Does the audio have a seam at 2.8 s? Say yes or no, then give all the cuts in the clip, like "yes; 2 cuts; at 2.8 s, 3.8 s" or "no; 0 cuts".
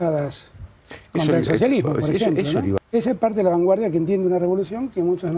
yes; 1 cut; at 2.8 s